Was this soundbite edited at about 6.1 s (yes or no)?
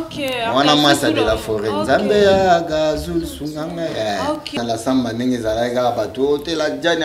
no